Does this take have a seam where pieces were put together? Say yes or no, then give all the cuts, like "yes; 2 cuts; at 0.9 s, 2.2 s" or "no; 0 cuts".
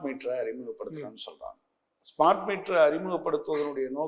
no; 0 cuts